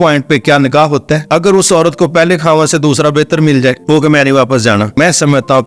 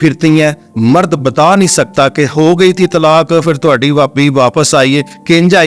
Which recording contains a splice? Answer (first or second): first